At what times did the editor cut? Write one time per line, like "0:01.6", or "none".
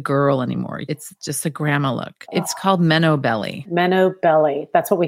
0:00.8
0:02.2
0:03.6